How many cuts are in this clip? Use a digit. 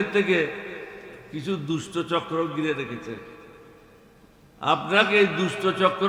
0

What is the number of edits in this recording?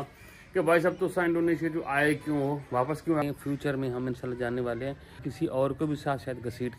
2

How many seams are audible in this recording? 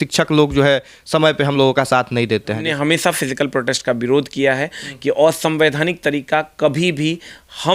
1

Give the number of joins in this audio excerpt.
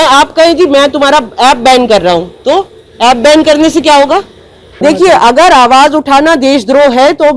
1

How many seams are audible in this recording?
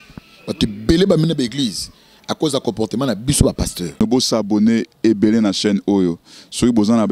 1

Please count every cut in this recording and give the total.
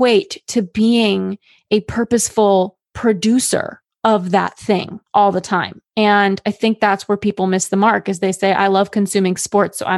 1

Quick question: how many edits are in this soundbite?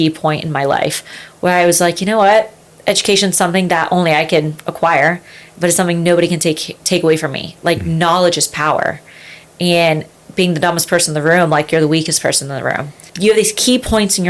1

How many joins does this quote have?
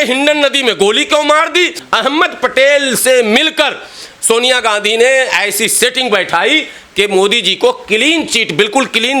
1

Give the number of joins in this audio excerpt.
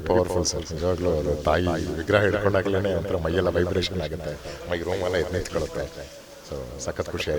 0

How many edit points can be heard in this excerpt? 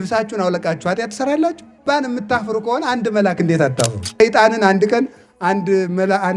2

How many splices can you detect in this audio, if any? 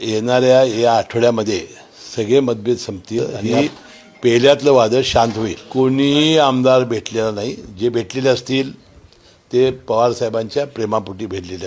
2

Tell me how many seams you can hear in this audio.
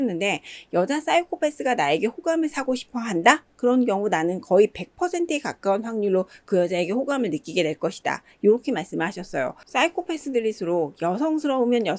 1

